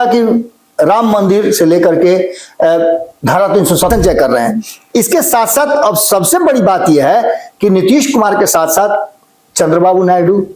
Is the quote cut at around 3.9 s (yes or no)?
yes